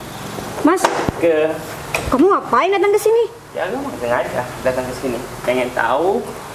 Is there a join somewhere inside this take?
no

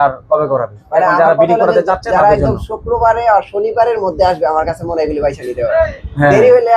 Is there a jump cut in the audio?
no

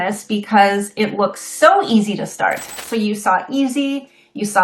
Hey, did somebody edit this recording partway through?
yes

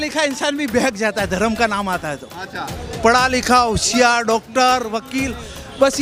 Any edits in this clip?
no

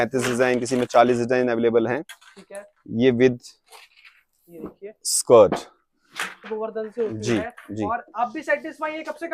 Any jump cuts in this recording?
yes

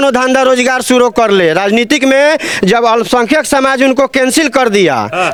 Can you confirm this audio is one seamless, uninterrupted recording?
yes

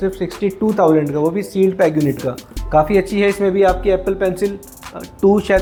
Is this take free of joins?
yes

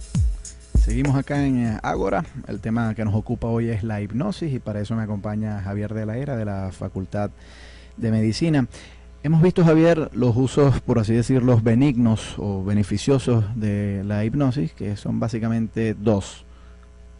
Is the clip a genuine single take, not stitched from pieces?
yes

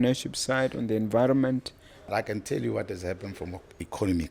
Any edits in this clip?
yes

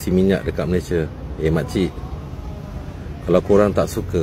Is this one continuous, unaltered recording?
yes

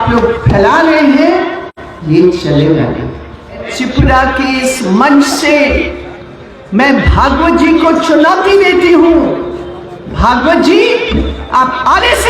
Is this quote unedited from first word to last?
no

